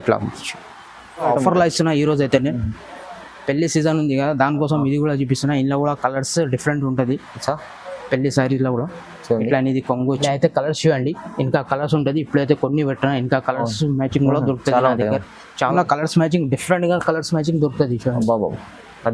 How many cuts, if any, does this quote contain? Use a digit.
3